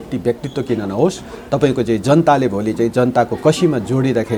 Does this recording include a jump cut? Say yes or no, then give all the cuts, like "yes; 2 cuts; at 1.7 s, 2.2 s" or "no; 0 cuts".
no; 0 cuts